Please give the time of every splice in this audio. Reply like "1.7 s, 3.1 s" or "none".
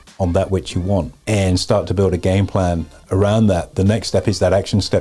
1.2 s